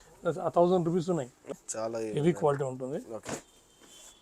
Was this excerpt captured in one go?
no; 1 cut; at 1.6 s

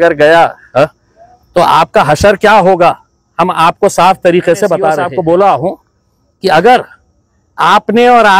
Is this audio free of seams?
no; 1 cut; at 5.1 s

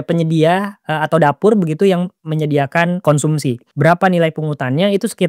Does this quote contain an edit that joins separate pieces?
yes; 1 cut; at 3.4 s

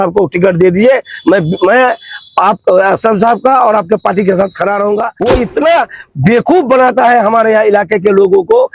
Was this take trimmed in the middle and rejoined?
yes; 1 cut; at 5.1 s

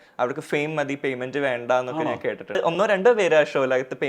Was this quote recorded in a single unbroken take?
no; 1 cut; at 2.6 s

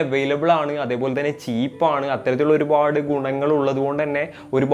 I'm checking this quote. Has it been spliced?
no; 0 cuts

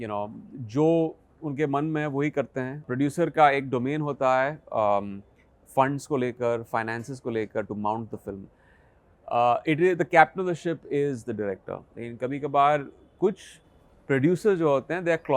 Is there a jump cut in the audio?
yes; 1 cut; at 2.9 s

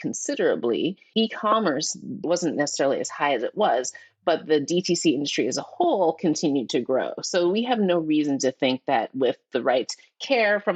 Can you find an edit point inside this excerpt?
no; 0 cuts

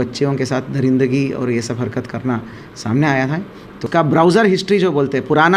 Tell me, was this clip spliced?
yes; 1 cut; at 3.9 s

